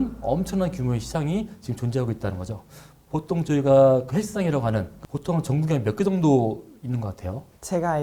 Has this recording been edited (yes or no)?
yes